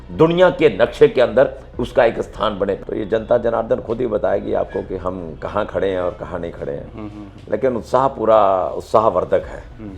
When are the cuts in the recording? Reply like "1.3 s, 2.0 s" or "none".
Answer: 2.8 s